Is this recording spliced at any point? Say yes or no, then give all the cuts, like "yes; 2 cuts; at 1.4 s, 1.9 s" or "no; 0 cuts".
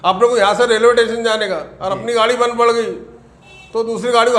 no; 0 cuts